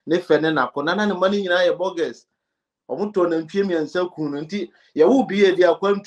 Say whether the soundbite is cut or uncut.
uncut